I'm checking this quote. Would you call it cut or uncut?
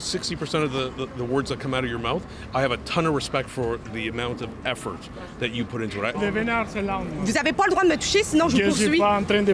cut